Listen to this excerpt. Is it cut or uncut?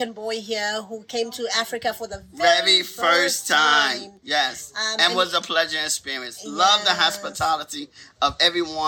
uncut